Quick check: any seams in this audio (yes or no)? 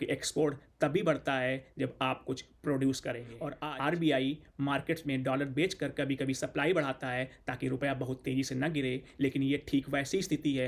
yes